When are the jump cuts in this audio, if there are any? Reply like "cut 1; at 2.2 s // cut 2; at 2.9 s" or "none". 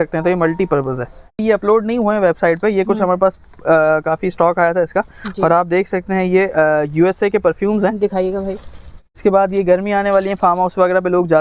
cut 1; at 1.4 s // cut 2; at 9.2 s